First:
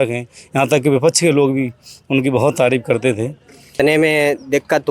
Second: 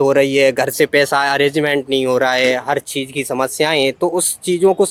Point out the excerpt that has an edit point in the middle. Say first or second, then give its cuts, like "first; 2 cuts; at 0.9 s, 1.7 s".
first; 1 cut; at 3.8 s